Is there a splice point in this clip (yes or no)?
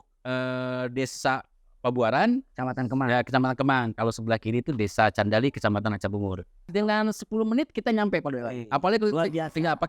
yes